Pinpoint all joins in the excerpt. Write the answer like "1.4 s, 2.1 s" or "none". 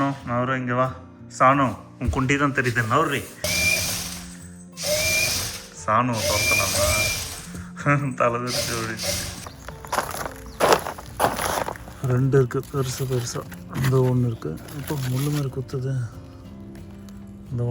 3.4 s, 9.5 s